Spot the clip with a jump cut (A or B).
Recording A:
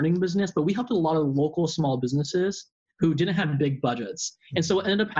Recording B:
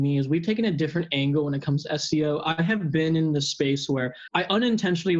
B